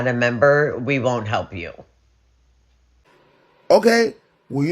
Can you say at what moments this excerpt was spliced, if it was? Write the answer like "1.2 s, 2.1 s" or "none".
3.0 s